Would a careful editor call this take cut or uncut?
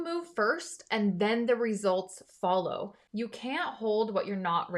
cut